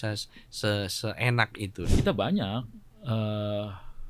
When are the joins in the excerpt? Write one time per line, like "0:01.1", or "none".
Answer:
0:01.8